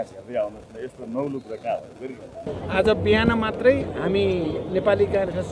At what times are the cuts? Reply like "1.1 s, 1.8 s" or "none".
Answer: 2.5 s

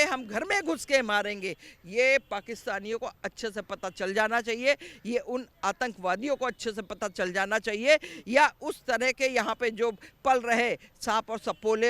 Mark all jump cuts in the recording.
none

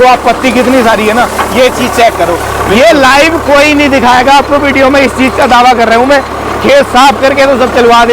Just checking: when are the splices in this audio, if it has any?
none

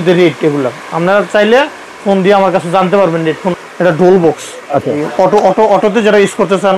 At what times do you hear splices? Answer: 3.6 s, 5.0 s

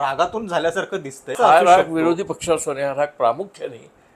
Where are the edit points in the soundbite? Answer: 1.4 s

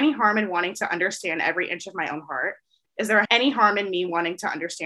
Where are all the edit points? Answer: 3.3 s

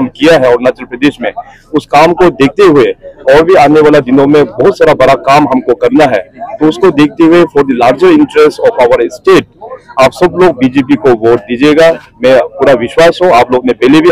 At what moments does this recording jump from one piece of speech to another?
none

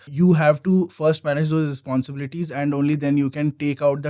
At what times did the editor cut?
none

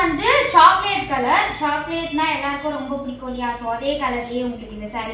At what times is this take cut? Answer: none

